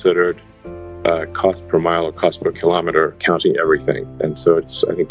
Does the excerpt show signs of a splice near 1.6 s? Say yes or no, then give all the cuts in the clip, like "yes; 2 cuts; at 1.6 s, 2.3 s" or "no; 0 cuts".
no; 2 cuts; at 3.2 s, 4.1 s